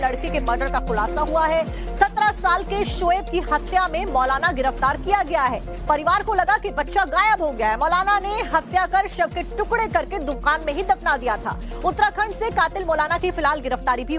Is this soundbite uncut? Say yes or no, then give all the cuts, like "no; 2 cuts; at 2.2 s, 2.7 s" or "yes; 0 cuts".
no; 1 cut; at 10.6 s